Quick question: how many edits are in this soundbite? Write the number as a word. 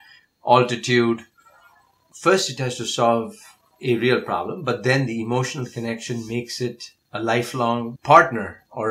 two